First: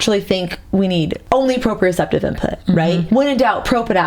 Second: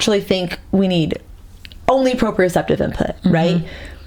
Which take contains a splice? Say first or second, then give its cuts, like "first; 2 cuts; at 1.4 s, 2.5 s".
first; 2 cuts; at 1.2 s, 3.0 s